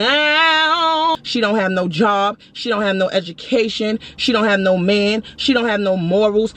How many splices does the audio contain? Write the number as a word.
one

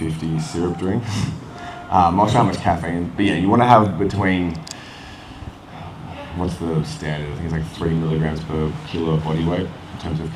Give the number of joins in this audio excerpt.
zero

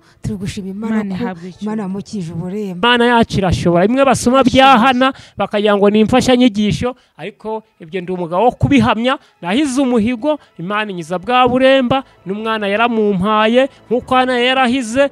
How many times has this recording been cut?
one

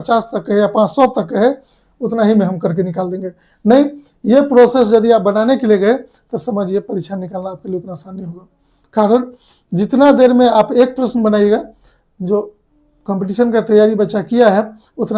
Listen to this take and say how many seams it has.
zero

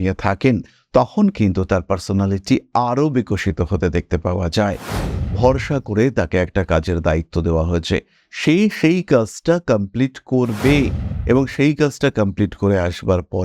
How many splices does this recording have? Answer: one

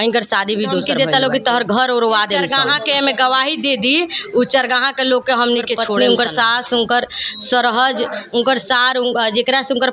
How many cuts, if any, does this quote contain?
three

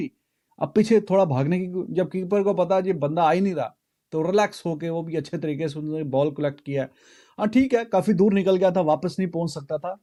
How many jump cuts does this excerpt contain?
zero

